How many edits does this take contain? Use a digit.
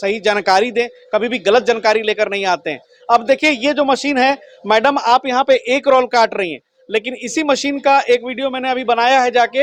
0